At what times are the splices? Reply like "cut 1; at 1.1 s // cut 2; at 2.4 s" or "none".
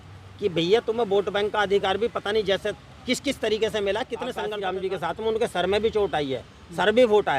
cut 1; at 4.4 s